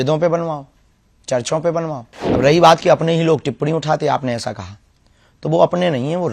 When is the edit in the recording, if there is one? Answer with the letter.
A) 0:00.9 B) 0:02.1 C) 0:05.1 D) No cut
B